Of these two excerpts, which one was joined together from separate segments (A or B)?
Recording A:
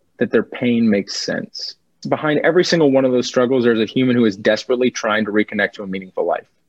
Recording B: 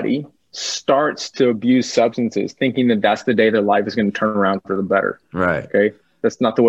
A